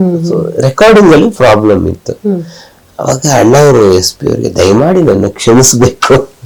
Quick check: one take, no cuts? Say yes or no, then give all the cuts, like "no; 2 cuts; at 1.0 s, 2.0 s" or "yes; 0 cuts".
yes; 0 cuts